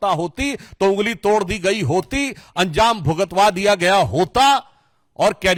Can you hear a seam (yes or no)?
no